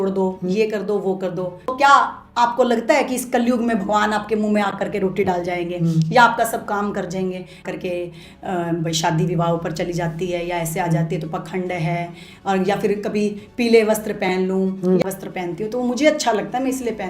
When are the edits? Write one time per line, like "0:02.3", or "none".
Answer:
0:01.7
0:07.6
0:15.0

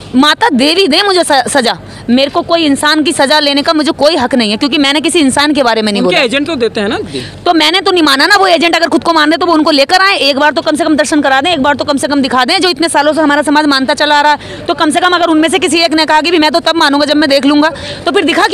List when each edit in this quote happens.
none

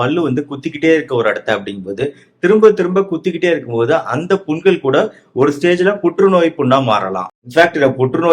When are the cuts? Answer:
0:07.3

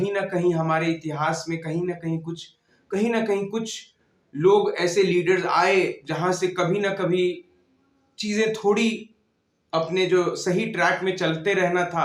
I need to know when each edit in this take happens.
none

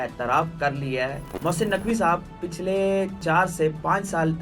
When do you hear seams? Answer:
0:01.3
0:03.2

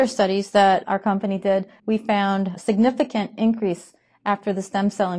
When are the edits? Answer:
0:01.7

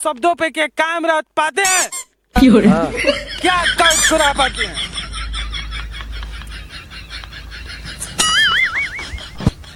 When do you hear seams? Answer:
none

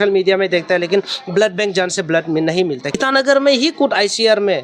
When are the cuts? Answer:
0:03.0

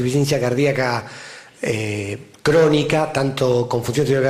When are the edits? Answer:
0:01.6

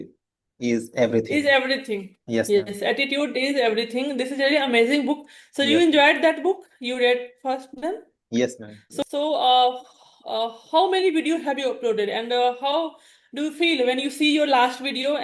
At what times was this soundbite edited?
0:09.0

